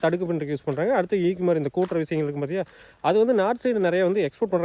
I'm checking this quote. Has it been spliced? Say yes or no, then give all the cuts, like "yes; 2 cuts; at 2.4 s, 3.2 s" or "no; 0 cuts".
no; 0 cuts